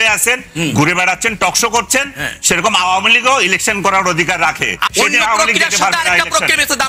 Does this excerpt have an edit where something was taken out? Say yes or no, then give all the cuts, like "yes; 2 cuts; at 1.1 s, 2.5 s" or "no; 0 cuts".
yes; 1 cut; at 4.8 s